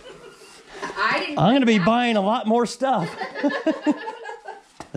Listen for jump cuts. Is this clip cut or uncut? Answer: uncut